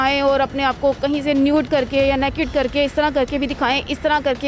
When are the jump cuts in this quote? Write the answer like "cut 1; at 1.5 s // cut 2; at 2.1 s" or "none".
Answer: none